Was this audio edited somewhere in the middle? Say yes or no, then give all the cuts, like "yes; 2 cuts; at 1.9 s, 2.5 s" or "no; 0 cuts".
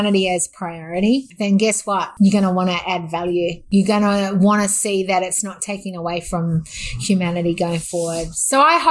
yes; 2 cuts; at 2.1 s, 3.6 s